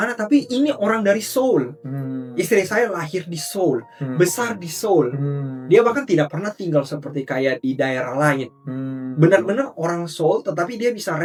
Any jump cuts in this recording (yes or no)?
no